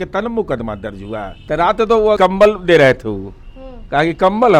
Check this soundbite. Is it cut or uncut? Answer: cut